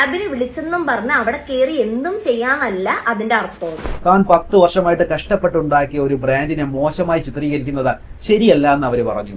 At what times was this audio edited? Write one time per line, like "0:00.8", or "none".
0:03.8